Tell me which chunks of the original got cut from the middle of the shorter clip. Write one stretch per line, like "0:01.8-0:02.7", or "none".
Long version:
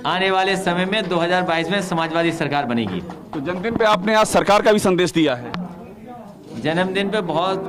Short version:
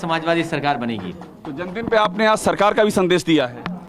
none